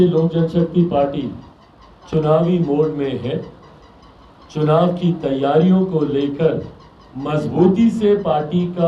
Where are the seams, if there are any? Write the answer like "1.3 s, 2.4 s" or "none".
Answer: none